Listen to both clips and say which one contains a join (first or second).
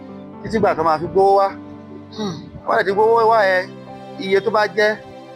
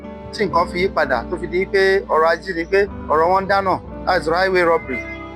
second